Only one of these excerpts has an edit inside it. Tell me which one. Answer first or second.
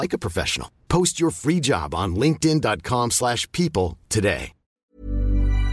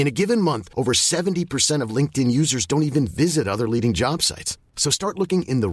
first